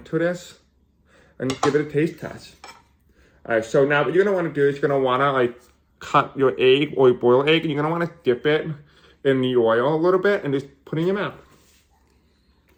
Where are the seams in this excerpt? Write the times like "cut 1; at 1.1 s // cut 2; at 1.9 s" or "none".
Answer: none